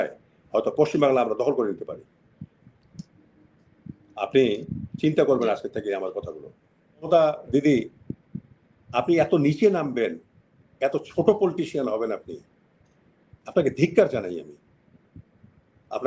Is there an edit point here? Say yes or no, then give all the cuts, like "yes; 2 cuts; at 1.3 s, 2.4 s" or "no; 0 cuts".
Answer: yes; 1 cut; at 7.1 s